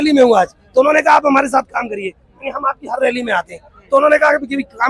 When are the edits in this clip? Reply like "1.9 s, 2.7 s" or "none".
none